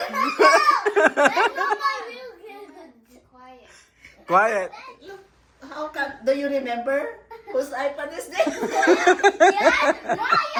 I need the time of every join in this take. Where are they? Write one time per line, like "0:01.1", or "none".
none

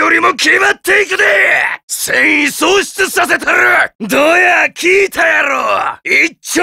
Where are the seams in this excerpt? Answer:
0:04.0

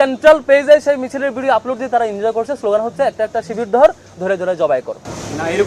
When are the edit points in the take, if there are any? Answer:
none

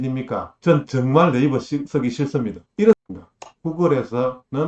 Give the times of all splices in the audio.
0:03.0

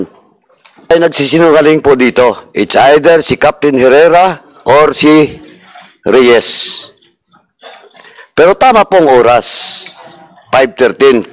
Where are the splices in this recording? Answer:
0:00.9

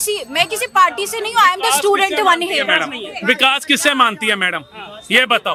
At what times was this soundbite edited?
none

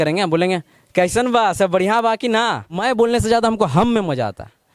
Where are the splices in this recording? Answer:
0:02.8

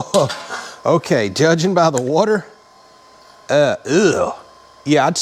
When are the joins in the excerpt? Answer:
none

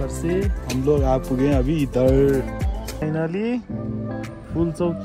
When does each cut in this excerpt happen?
0:03.0

